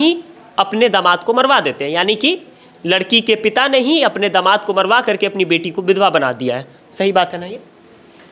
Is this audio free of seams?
yes; 0 cuts

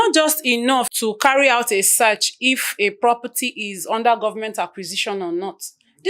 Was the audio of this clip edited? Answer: yes; 1 cut; at 0.9 s

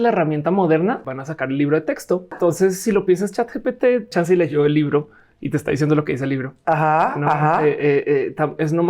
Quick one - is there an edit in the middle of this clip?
yes; 3 cuts; at 1.1 s, 2.3 s, 4.1 s

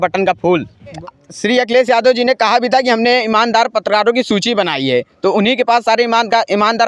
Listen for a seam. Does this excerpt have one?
yes; 1 cut; at 1.0 s

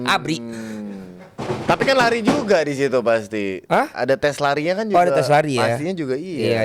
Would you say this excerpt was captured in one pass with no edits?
yes; 0 cuts

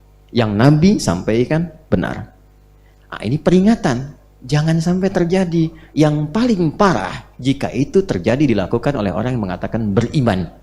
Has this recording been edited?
no; 0 cuts

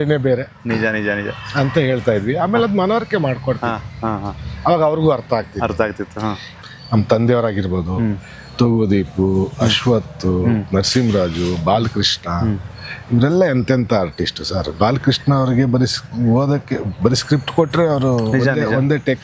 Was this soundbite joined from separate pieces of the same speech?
yes; 1 cut; at 6.6 s

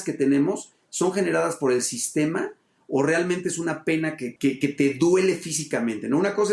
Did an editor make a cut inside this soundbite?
no; 0 cuts

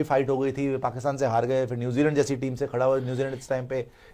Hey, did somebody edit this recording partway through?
no; 0 cuts

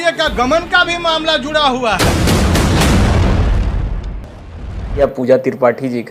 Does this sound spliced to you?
no; 0 cuts

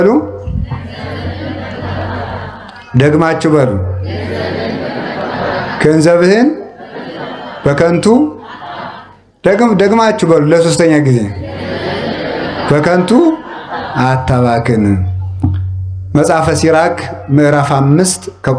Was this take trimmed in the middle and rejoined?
no; 0 cuts

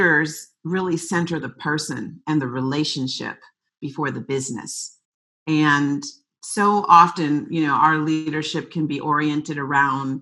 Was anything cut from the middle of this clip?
no; 0 cuts

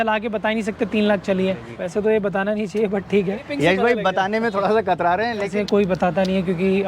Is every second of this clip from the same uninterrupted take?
no; 3 cuts; at 1.7 s, 3.4 s, 5.5 s

